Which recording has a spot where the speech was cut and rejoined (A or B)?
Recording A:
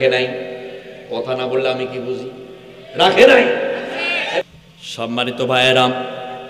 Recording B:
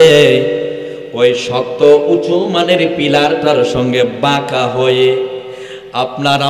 A